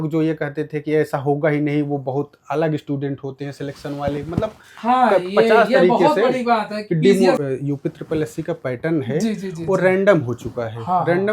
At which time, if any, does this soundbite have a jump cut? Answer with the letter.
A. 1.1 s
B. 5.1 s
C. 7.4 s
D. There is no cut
C